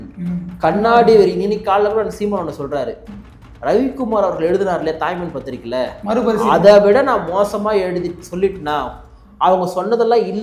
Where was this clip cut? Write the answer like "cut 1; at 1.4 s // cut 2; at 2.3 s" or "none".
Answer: none